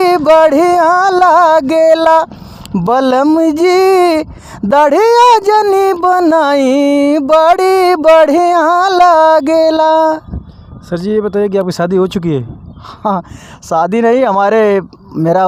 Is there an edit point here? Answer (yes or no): no